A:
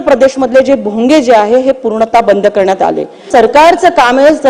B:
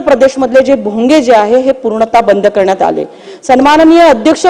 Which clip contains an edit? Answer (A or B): A